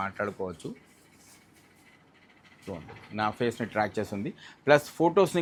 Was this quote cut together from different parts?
no; 0 cuts

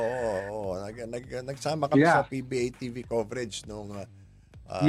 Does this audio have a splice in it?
no; 0 cuts

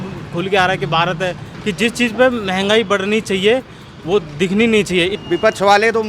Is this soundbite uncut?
no; 2 cuts; at 1.5 s, 5.2 s

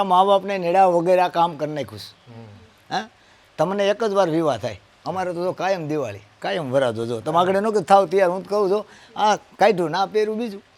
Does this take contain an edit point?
no; 0 cuts

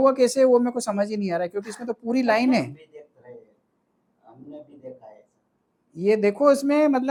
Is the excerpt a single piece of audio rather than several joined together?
yes; 0 cuts

